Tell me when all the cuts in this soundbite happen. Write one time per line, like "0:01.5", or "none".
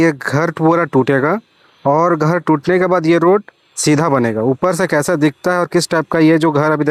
none